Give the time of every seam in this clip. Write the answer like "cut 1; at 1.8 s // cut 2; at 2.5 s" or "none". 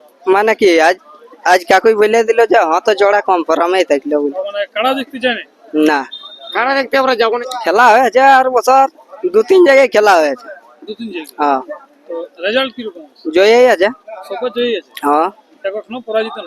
cut 1; at 7.4 s